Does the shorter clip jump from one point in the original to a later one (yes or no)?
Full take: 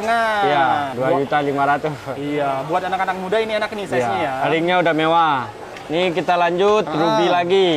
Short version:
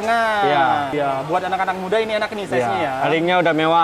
yes